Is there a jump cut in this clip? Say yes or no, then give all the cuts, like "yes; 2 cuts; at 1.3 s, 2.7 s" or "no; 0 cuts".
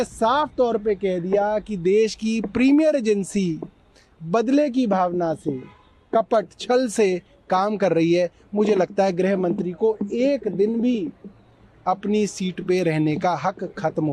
no; 0 cuts